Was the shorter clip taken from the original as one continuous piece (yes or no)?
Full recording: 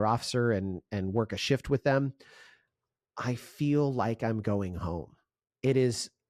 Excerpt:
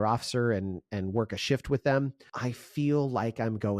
no